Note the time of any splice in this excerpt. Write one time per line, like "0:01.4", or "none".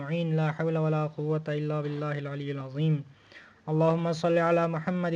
0:02.0